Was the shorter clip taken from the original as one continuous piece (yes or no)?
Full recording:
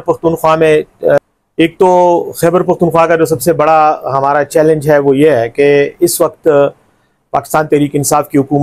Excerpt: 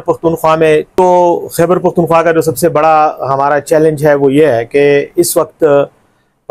no